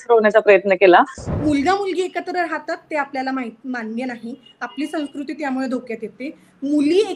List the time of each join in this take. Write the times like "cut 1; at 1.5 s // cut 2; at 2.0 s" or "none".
cut 1; at 1.2 s